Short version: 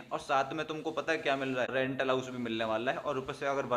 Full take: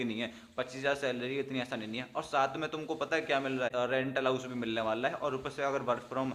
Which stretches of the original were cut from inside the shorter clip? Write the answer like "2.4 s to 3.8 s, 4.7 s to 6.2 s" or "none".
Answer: 3.7 s to 3.9 s